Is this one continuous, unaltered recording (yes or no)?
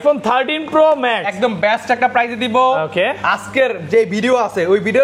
yes